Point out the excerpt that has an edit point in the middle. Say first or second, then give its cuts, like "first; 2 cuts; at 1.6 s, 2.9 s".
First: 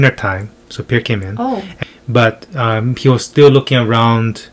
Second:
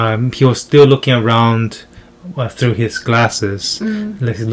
first; 1 cut; at 1.7 s